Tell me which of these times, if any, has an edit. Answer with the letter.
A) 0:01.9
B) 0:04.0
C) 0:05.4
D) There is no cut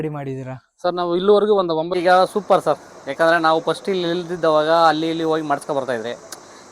A